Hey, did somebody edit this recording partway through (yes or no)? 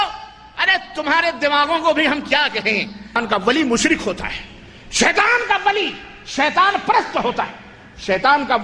yes